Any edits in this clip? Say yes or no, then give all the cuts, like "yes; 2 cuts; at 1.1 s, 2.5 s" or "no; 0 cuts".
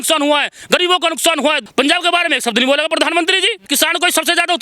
yes; 2 cuts; at 1.6 s, 3.7 s